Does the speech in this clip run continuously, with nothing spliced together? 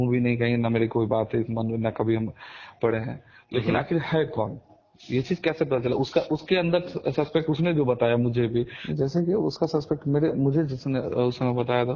no; 1 cut; at 8.8 s

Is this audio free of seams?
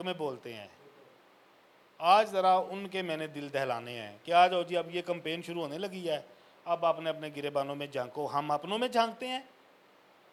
yes; 0 cuts

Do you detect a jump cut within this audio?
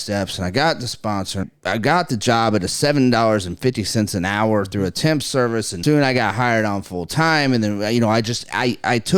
yes; 2 cuts; at 1.4 s, 5.7 s

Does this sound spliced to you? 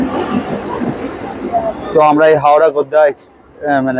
no; 0 cuts

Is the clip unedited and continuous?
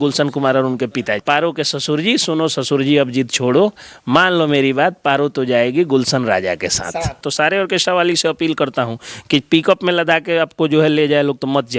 no; 2 cuts; at 1.1 s, 7.2 s

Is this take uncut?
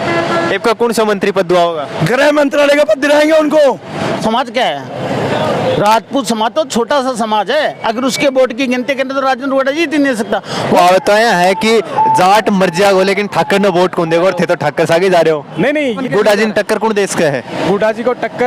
no; 3 cuts; at 4.2 s, 10.8 s, 15.9 s

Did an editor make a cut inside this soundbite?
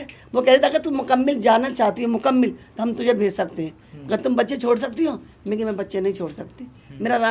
no; 0 cuts

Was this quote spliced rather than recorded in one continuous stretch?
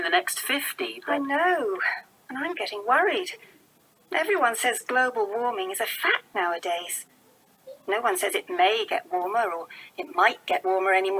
no; 0 cuts

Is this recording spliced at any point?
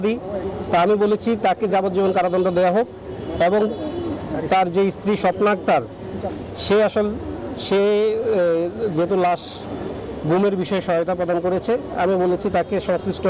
no; 0 cuts

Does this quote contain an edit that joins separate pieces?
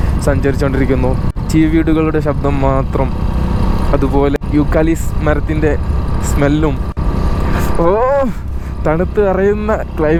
no; 0 cuts

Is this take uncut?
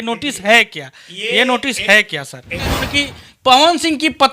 no; 1 cut; at 2.8 s

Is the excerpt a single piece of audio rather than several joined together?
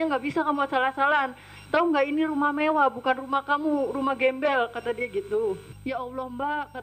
no; 1 cut; at 5.7 s

